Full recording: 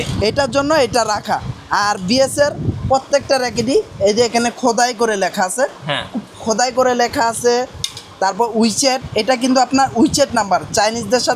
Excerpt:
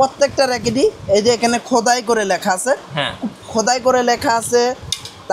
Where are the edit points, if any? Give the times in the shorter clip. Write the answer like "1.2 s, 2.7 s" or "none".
none